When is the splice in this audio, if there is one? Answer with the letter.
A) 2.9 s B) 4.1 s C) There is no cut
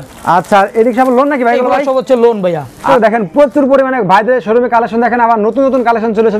A